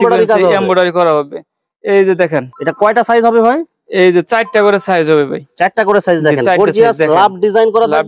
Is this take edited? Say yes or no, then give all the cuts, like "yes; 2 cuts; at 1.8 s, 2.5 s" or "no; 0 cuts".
no; 0 cuts